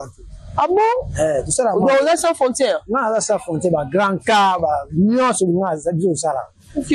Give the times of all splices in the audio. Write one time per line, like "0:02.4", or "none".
none